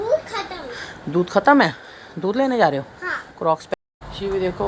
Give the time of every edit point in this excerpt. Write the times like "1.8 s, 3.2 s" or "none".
3.7 s